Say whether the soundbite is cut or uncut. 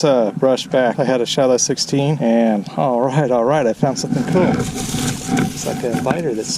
cut